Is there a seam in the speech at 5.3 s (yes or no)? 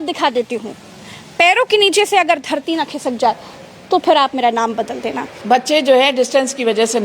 yes